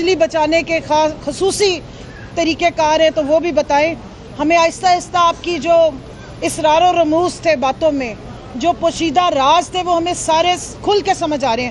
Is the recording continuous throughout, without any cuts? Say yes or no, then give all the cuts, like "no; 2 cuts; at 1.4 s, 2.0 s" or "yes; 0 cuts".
yes; 0 cuts